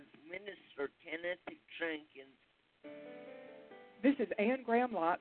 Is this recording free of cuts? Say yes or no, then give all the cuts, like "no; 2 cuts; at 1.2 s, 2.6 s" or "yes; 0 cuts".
no; 1 cut; at 2.7 s